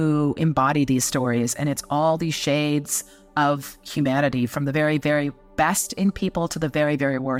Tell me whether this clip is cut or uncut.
uncut